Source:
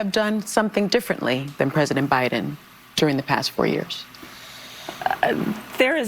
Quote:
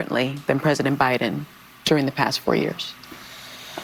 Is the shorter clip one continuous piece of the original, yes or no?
yes